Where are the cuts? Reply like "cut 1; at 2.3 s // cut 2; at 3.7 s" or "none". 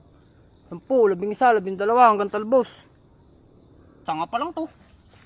cut 1; at 4.0 s

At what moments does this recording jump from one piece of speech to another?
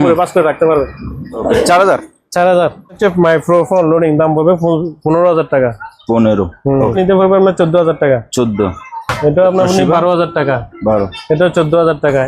cut 1; at 1.4 s // cut 2; at 3.0 s // cut 3; at 7.0 s

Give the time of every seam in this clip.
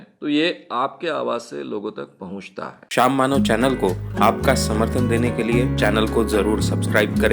cut 1; at 2.8 s

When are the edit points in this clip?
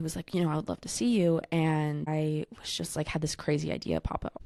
none

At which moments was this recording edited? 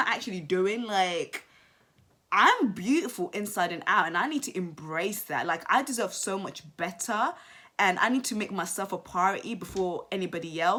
none

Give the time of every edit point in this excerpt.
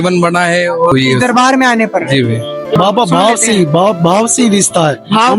cut 1; at 0.9 s // cut 2; at 2.7 s

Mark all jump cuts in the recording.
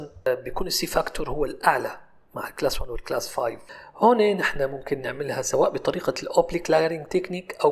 cut 1; at 3.6 s

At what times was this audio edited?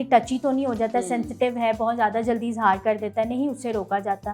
none

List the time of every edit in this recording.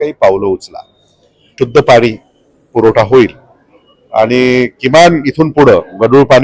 cut 1; at 1.5 s

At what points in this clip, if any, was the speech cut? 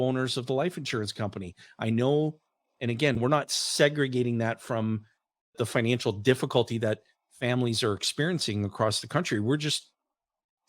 cut 1; at 3.2 s // cut 2; at 5.6 s

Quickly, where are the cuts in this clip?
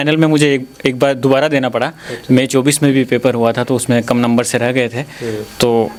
none

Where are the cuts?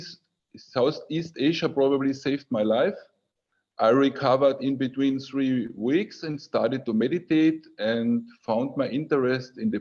none

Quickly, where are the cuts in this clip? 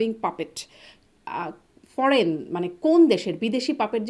none

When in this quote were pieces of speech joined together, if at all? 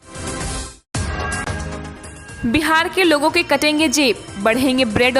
cut 1; at 2.2 s

